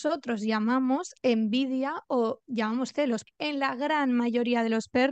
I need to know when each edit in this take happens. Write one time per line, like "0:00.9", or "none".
0:03.2